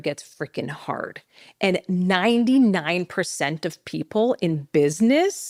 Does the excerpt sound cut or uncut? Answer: uncut